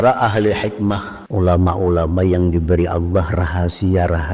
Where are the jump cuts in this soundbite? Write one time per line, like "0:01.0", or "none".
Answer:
0:01.1